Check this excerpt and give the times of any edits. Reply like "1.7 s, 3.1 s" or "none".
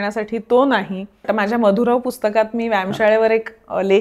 1.2 s